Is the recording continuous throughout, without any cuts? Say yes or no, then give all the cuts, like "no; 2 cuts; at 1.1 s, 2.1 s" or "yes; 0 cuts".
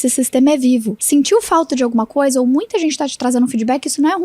no; 1 cut; at 1.0 s